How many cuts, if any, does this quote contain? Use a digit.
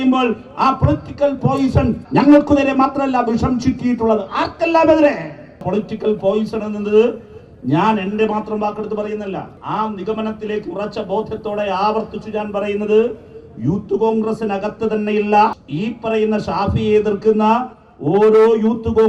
4